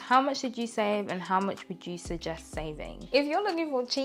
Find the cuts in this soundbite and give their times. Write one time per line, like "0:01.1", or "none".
0:03.1